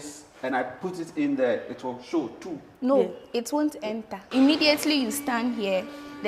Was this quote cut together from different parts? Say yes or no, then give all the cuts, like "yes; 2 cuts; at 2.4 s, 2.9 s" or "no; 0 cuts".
yes; 1 cut; at 4.3 s